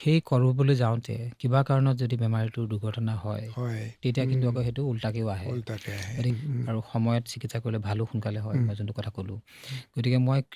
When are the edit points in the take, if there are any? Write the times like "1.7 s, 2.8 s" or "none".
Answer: 6.3 s